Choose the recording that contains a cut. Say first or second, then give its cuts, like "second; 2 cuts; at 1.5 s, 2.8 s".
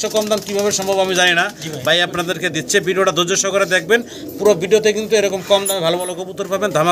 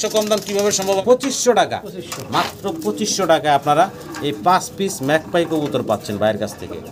second; 1 cut; at 1.0 s